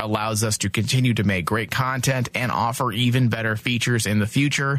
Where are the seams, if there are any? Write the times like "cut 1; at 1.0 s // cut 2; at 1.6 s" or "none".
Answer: none